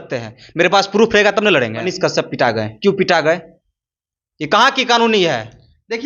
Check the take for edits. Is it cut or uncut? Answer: uncut